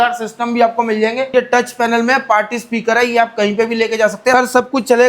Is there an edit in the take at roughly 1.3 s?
yes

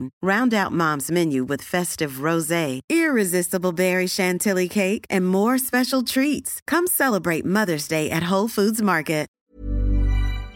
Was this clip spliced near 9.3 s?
yes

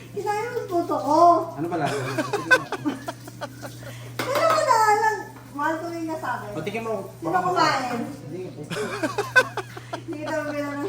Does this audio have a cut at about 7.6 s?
no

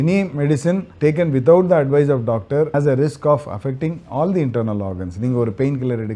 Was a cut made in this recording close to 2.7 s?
yes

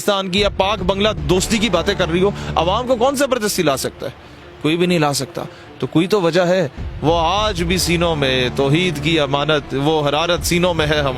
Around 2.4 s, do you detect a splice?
yes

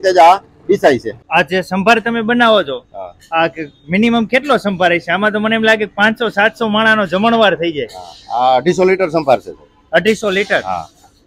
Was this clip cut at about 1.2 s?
yes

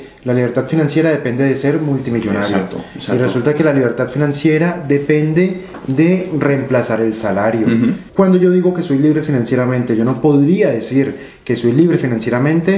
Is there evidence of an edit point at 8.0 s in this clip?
yes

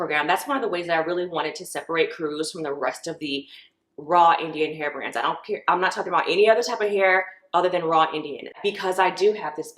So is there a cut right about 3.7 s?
no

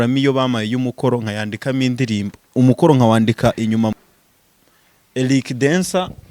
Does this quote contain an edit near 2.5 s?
no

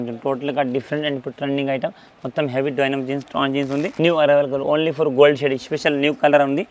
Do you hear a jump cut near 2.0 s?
no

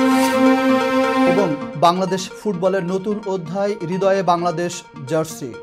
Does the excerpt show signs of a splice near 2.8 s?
no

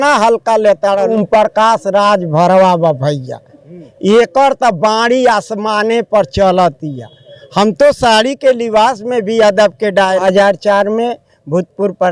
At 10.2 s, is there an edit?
yes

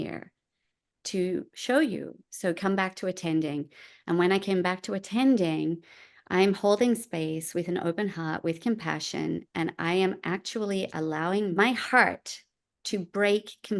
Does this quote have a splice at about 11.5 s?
yes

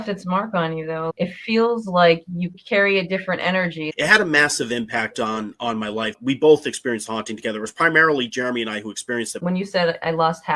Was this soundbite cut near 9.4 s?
yes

